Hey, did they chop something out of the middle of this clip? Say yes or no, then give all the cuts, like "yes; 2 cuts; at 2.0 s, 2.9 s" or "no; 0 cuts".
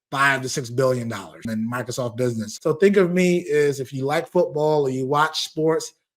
yes; 2 cuts; at 1.4 s, 2.5 s